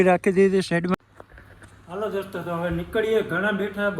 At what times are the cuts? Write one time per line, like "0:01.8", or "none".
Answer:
0:00.9